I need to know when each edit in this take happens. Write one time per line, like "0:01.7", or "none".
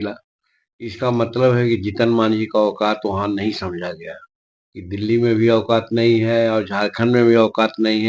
none